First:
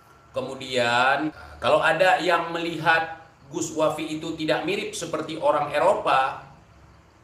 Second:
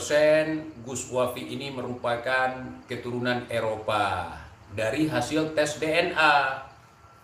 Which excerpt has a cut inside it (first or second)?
first